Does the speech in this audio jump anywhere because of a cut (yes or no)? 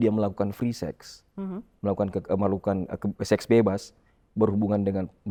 no